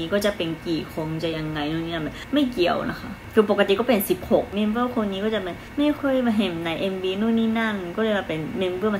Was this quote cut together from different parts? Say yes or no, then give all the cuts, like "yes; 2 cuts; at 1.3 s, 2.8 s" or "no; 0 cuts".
yes; 4 cuts; at 2.2 s, 3.2 s, 4.5 s, 5.8 s